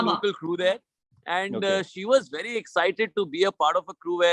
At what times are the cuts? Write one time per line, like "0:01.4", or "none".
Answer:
none